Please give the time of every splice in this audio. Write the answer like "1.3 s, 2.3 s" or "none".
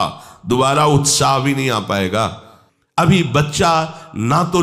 3.0 s